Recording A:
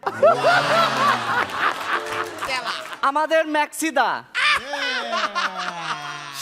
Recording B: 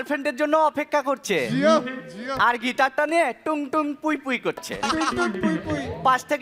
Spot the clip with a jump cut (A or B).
A